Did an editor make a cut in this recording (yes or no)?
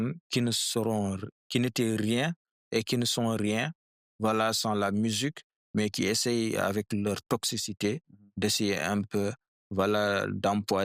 no